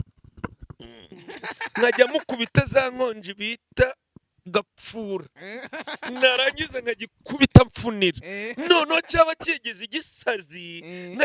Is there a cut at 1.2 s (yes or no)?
yes